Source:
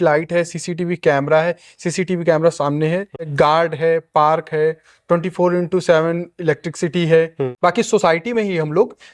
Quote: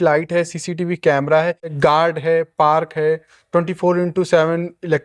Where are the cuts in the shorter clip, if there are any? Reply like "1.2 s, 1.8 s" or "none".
1.6 s